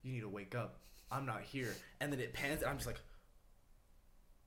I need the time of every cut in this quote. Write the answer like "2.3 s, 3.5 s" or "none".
none